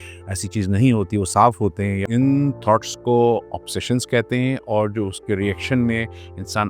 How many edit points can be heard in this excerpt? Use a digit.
1